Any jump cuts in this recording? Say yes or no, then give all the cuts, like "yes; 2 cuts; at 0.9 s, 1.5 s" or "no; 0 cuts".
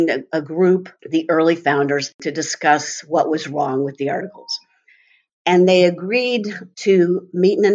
yes; 2 cuts; at 1.0 s, 2.1 s